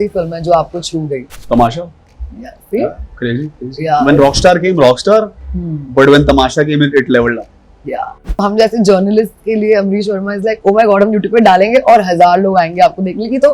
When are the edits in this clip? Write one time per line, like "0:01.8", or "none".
0:01.3
0:08.4